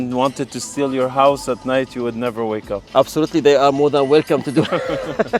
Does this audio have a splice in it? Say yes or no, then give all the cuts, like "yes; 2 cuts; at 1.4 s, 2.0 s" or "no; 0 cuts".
no; 0 cuts